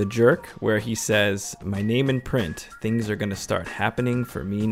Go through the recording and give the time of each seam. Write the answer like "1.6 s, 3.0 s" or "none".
none

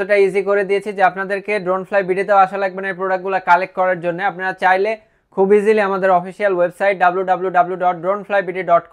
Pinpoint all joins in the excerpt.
none

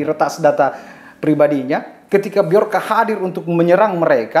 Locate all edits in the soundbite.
1.9 s

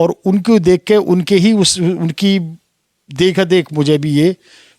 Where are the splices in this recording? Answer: none

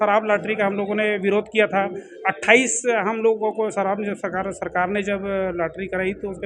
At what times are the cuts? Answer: none

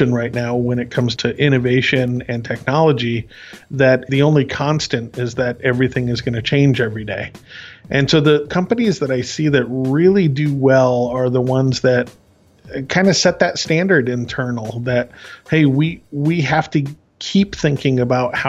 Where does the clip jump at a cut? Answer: 1.1 s, 4.1 s, 8.5 s

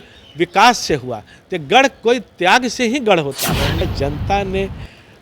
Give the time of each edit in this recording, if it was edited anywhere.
3.8 s

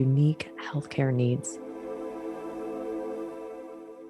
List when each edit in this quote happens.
1.5 s

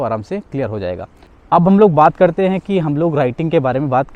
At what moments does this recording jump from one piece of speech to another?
1.4 s

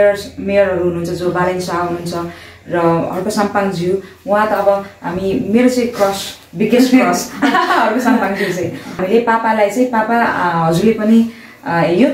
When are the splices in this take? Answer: 9.0 s

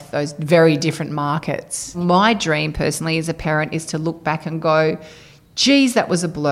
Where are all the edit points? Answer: 2.0 s

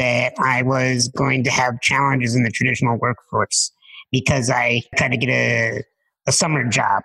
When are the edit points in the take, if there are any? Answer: 4.9 s

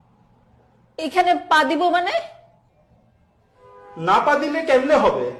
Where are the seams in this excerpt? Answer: none

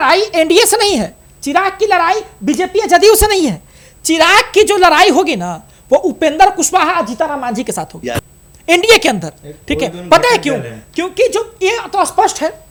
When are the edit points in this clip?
none

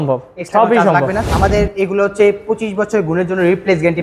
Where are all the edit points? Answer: 1.3 s

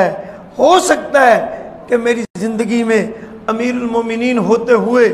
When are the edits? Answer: none

